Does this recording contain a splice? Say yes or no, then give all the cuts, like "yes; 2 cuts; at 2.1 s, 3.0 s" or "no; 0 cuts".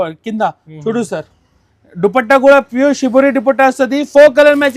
no; 0 cuts